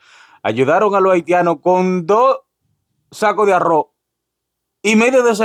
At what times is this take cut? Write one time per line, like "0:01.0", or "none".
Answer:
none